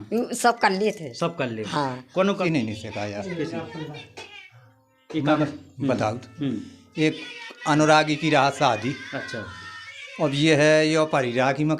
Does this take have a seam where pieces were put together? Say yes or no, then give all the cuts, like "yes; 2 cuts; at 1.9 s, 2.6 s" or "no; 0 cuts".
yes; 1 cut; at 2.4 s